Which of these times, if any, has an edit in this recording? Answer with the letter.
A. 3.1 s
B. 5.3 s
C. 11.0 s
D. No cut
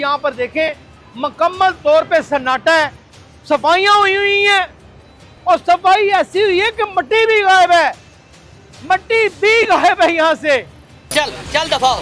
C